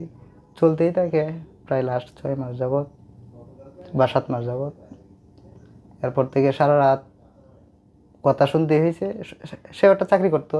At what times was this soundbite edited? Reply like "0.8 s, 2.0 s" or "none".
none